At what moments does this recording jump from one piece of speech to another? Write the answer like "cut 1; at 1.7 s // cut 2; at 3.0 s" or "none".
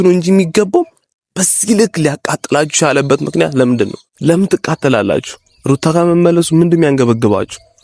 none